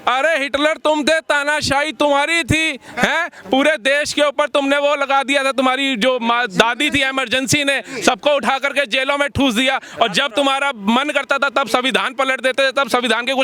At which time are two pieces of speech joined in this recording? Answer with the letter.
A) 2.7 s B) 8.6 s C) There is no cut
C